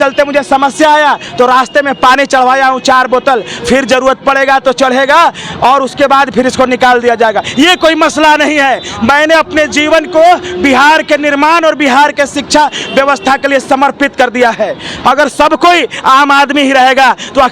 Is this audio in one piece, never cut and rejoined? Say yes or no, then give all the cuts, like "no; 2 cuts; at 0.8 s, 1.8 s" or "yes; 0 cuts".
yes; 0 cuts